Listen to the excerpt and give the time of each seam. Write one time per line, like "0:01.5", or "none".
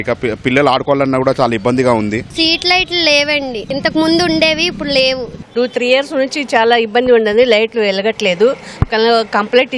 0:02.2
0:05.3